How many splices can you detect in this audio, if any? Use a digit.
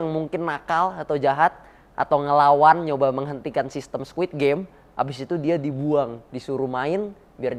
0